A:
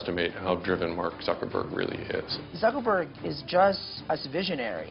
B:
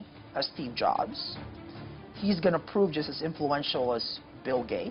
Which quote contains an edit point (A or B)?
A